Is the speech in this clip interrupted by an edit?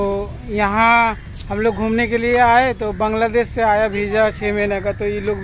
no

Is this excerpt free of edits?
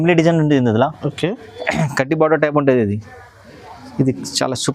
yes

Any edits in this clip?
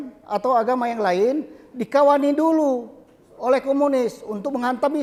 no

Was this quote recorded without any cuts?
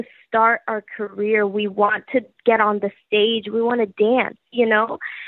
yes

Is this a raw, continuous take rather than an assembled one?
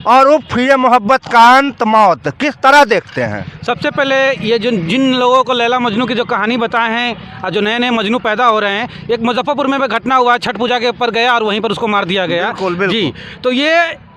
yes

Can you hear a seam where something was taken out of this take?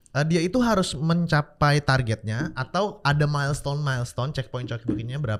no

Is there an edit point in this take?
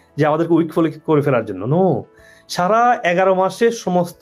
no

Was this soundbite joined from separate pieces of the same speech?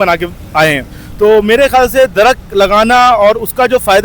no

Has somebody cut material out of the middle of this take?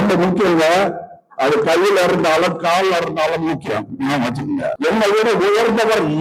yes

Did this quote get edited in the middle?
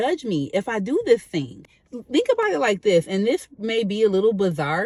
no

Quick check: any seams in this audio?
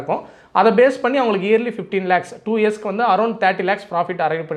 no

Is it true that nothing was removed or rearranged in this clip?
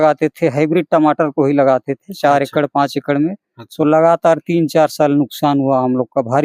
yes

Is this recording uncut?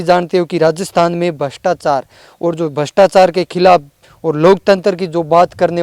yes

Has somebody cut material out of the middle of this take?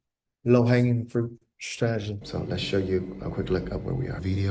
yes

